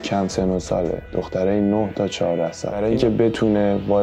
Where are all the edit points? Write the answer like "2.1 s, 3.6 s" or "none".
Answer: 2.7 s